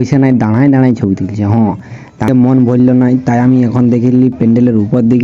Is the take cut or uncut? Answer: cut